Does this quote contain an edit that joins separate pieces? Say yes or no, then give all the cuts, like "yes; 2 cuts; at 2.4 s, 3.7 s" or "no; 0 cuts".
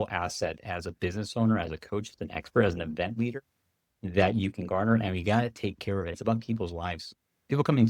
yes; 1 cut; at 6.2 s